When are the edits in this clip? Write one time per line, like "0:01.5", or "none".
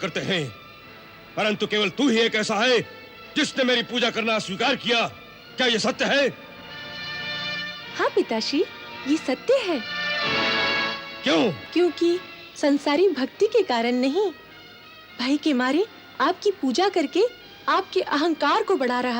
none